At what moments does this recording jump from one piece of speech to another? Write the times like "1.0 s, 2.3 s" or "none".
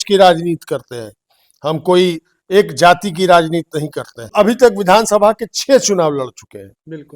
4.3 s